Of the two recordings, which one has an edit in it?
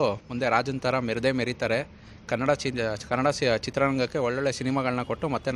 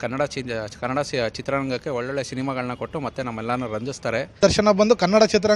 second; 1 cut; at 4.4 s

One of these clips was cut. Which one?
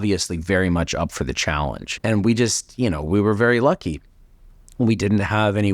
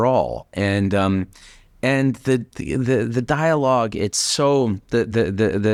first; 1 cut; at 1.9 s

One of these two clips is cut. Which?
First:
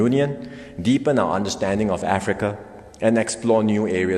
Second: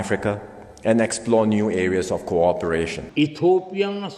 second; 1 cut; at 3.0 s

